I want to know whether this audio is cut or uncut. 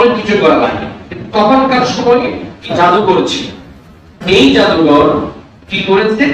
cut